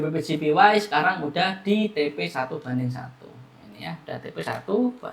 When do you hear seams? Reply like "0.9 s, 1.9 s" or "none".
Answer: none